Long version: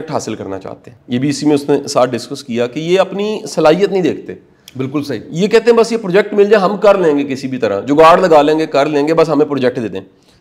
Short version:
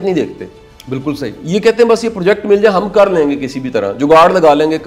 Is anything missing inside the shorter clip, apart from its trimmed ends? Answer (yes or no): no